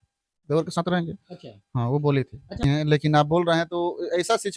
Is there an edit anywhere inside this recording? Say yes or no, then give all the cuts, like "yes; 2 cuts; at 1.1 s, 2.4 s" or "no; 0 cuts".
yes; 1 cut; at 2.7 s